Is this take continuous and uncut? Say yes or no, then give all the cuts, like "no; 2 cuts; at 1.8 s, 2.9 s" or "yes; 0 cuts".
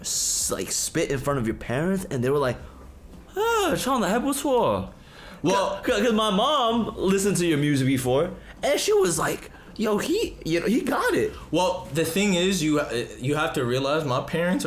yes; 0 cuts